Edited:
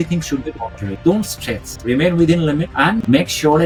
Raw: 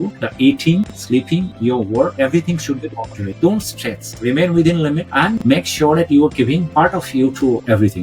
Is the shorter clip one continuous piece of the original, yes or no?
yes